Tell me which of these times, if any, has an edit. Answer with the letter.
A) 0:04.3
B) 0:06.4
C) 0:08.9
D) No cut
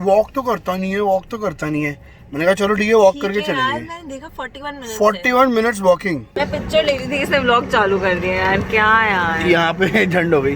B